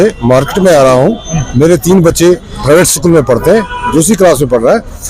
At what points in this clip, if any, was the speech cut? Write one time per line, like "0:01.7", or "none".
0:03.9